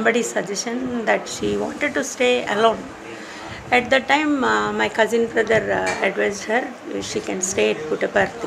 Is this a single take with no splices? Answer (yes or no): yes